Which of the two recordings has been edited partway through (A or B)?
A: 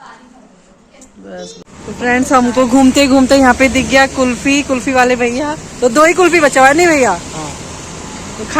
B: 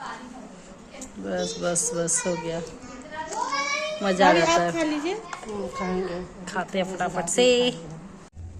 A